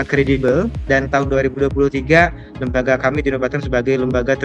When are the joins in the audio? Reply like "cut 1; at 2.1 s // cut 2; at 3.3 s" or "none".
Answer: none

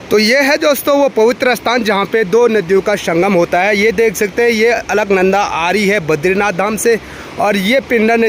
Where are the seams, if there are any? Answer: none

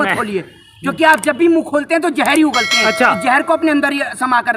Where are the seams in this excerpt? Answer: none

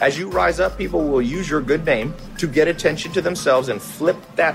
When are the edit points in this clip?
cut 1; at 2.2 s

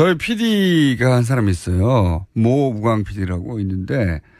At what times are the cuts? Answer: cut 1; at 1.3 s

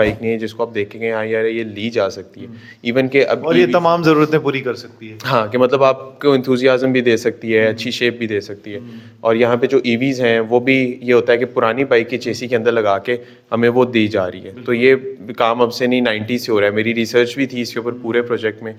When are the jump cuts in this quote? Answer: none

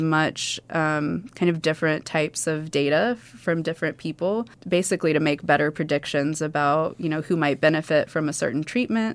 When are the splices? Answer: cut 1; at 4.6 s

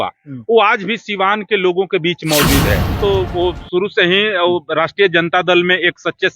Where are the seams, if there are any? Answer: cut 1; at 2.9 s

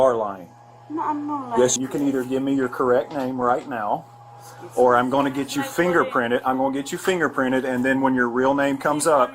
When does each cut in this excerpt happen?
cut 1; at 1.7 s

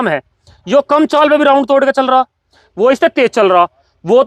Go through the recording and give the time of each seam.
none

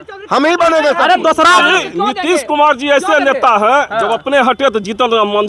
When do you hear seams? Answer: cut 1; at 1.6 s

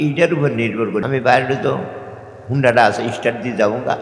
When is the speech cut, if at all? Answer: cut 1; at 1.0 s

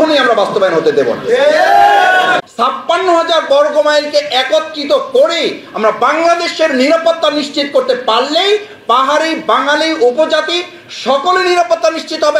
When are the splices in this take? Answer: cut 1; at 2.5 s

